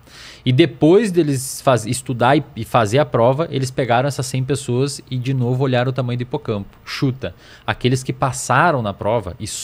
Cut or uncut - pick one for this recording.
uncut